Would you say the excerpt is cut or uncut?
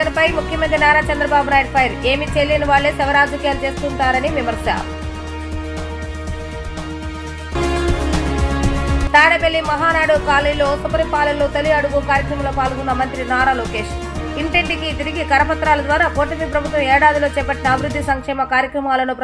uncut